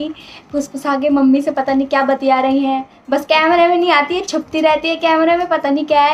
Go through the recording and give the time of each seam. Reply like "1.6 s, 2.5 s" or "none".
none